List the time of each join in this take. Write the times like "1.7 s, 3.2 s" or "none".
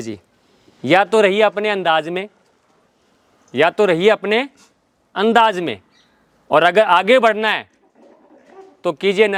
none